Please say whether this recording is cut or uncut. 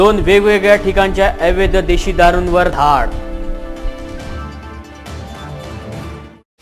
uncut